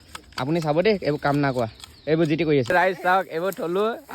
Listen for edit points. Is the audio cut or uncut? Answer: cut